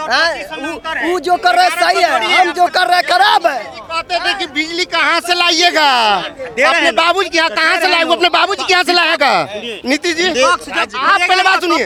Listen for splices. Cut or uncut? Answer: uncut